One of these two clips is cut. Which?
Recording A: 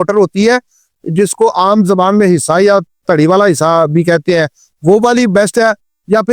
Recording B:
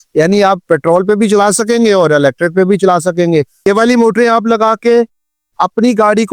B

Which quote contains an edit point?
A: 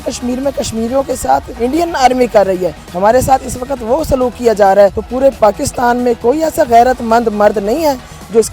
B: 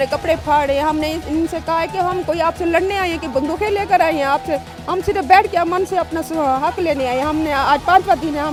A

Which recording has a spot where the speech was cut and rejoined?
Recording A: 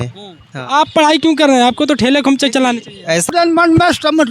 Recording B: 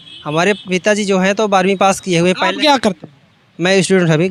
A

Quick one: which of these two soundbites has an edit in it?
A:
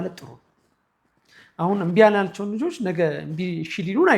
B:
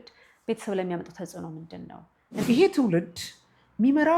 B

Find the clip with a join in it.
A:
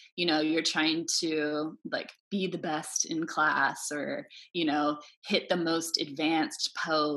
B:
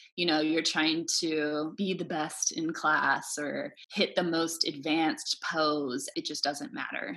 B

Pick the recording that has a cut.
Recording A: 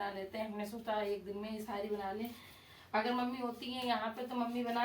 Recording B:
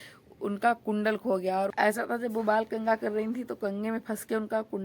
B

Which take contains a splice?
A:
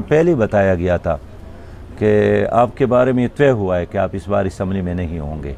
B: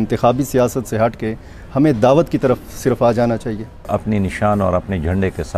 B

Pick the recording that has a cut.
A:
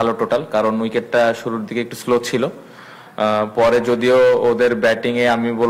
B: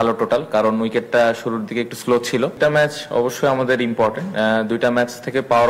B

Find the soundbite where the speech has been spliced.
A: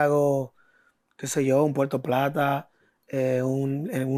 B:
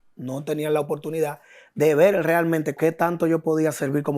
B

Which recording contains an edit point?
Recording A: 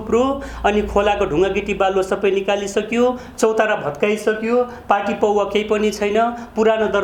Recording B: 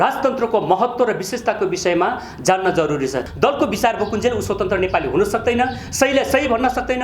B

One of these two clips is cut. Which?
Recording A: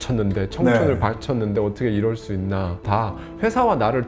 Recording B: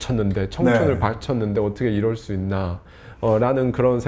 A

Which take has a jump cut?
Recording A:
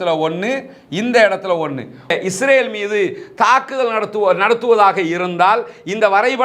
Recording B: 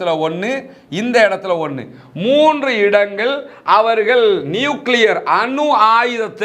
A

